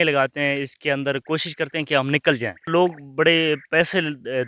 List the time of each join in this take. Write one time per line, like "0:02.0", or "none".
0:02.7